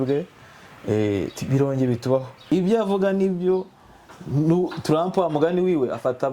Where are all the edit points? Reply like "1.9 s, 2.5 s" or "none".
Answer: 2.3 s